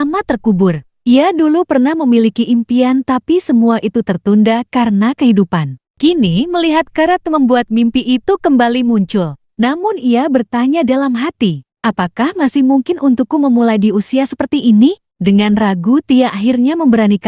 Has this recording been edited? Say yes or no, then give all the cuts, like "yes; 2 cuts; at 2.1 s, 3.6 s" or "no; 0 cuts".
yes; 1 cut; at 15.1 s